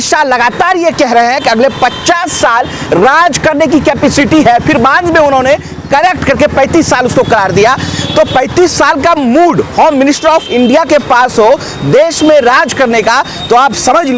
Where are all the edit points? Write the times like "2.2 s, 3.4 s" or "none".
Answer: none